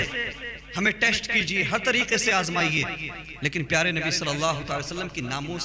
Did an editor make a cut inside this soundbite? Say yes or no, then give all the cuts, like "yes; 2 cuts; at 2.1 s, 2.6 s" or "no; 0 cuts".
no; 0 cuts